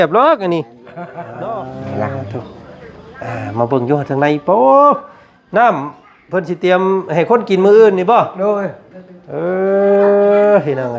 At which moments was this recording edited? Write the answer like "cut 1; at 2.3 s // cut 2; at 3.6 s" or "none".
cut 1; at 1.3 s